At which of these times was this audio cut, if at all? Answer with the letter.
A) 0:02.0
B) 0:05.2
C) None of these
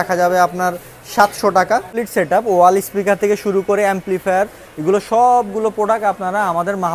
A